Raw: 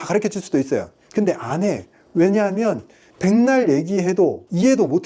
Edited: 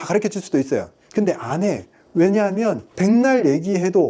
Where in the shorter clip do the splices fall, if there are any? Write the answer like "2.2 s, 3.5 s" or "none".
2.9 s